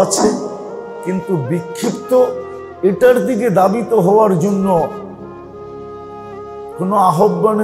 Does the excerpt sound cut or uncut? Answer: cut